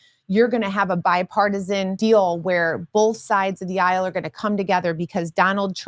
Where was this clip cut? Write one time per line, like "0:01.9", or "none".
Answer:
0:01.9